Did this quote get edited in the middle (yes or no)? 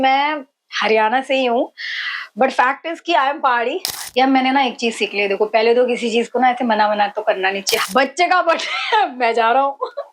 yes